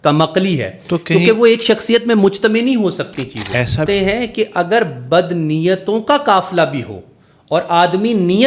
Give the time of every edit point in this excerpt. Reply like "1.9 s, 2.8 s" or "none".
3.9 s